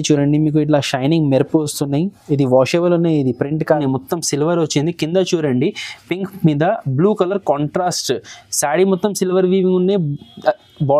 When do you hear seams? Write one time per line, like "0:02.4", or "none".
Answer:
0:03.7